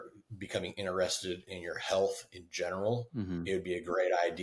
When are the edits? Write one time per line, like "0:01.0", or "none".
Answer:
none